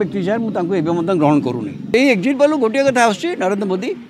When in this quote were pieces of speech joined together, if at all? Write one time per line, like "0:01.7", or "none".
0:01.9